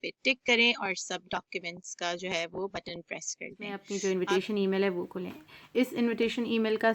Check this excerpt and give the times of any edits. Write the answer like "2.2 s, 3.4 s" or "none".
3.8 s